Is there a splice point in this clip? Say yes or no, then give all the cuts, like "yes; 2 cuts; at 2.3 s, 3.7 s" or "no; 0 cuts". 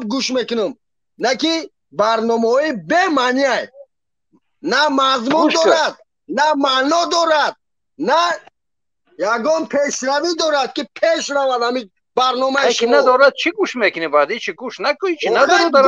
no; 0 cuts